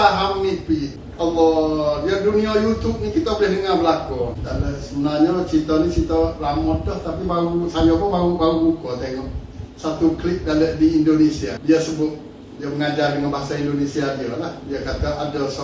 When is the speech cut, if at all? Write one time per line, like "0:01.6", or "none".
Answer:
0:01.0
0:04.4
0:11.6